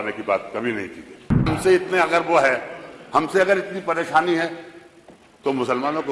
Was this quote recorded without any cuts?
no; 1 cut; at 1.5 s

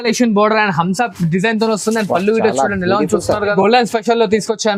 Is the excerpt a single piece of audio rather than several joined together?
no; 1 cut; at 3.5 s

